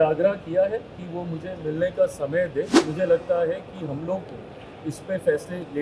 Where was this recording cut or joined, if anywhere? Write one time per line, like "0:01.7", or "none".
0:02.8